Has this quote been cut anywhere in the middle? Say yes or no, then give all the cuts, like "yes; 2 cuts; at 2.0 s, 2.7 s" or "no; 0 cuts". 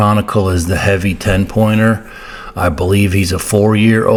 no; 0 cuts